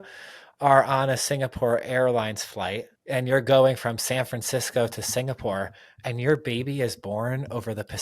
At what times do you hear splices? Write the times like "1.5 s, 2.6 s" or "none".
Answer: 2.9 s

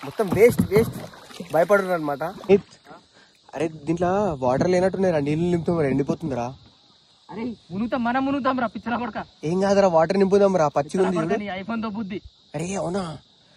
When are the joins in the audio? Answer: 2.4 s

